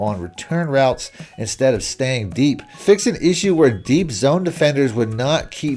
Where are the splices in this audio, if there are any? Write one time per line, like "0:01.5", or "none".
0:02.8